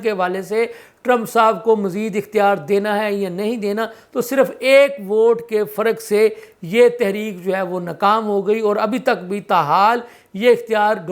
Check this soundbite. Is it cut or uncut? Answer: uncut